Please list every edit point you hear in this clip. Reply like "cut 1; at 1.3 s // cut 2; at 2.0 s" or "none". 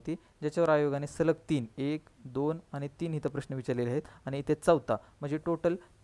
none